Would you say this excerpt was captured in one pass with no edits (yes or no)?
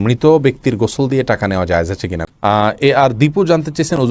no